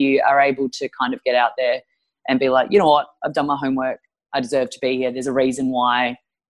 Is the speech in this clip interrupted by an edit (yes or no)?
no